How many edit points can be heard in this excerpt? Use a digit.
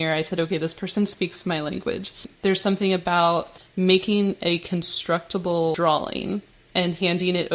4